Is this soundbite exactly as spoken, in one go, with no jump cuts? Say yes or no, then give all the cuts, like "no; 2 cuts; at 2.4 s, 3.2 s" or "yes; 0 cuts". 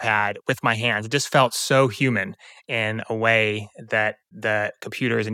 no; 1 cut; at 4.3 s